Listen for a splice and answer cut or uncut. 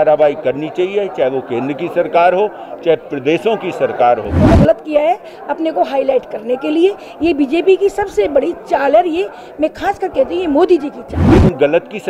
cut